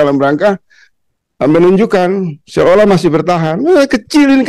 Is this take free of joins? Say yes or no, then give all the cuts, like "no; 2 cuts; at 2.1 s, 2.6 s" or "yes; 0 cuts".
yes; 0 cuts